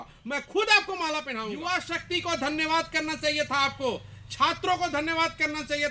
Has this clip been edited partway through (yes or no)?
yes